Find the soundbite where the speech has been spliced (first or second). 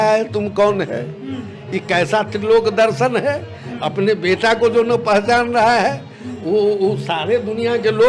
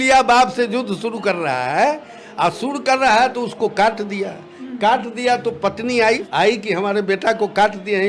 second